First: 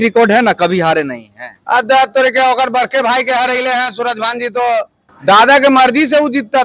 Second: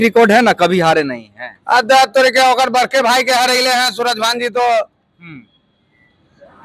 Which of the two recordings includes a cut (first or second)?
first